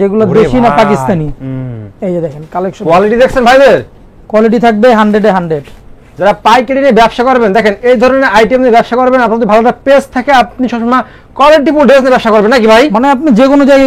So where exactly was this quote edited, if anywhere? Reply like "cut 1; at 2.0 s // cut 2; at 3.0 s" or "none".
none

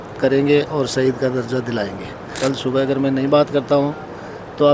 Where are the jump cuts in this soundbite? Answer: cut 1; at 2.3 s

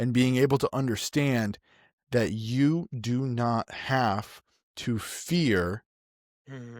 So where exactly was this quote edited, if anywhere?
none

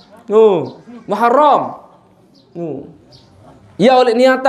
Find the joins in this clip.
none

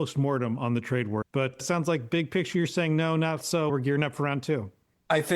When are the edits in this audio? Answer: cut 1; at 1.5 s

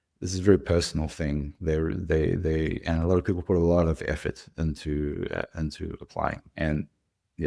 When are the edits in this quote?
none

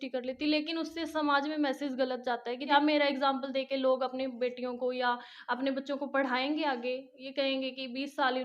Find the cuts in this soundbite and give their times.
cut 1; at 2.6 s

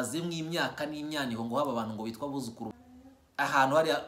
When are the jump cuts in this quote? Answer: cut 1; at 2.7 s

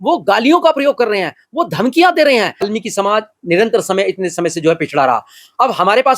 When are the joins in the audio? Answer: cut 1; at 2.7 s

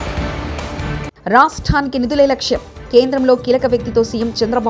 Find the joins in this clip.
cut 1; at 1.1 s

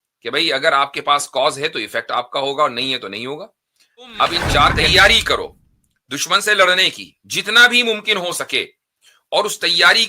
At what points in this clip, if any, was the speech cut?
cut 1; at 4.8 s

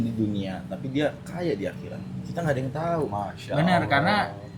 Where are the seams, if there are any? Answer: none

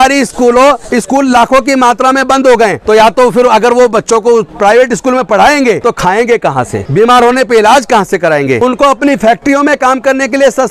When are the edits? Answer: cut 1; at 2.8 s // cut 2; at 5.8 s // cut 3; at 6.8 s // cut 4; at 8.6 s

